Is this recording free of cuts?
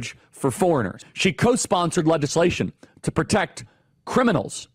no; 1 cut; at 1.0 s

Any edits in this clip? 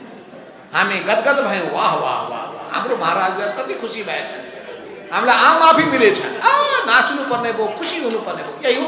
no; 0 cuts

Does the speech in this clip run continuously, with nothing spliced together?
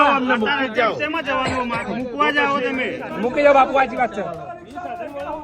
yes; 0 cuts

